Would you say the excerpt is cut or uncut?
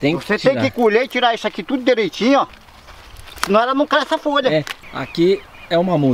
cut